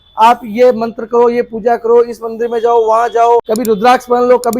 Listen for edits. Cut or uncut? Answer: cut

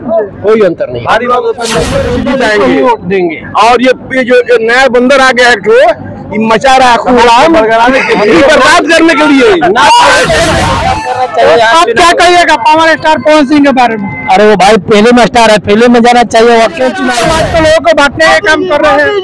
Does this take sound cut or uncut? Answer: cut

